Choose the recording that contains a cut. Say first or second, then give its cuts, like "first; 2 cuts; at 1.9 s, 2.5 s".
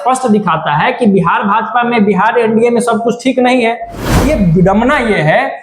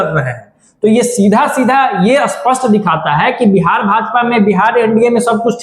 first; 1 cut; at 4.2 s